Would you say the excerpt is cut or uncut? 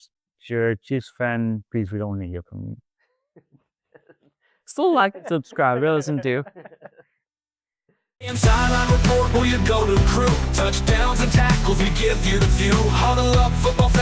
cut